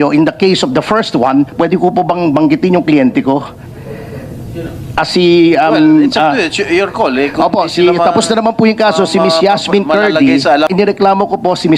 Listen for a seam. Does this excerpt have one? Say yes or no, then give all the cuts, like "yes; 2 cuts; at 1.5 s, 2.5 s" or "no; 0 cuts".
yes; 1 cut; at 10.7 s